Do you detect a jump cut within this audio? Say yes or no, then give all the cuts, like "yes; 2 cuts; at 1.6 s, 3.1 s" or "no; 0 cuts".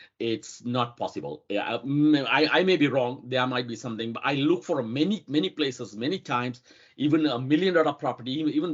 no; 0 cuts